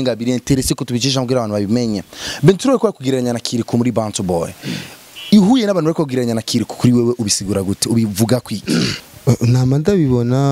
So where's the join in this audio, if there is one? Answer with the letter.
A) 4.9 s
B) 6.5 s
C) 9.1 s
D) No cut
C